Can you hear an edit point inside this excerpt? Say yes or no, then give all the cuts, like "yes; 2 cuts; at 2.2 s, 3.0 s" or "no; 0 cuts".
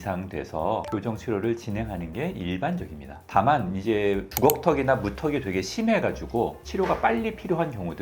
no; 0 cuts